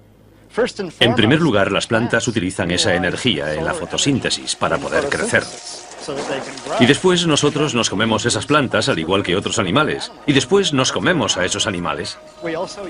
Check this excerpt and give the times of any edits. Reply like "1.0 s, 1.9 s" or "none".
none